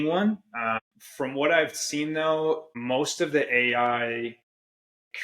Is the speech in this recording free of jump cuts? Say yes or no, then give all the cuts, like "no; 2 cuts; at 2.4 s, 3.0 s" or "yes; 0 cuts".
no; 2 cuts; at 0.8 s, 2.7 s